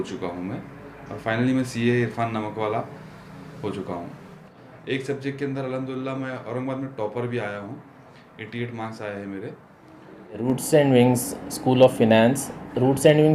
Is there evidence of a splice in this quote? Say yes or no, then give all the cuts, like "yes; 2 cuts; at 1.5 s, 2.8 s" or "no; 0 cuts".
yes; 2 cuts; at 4.3 s, 10.4 s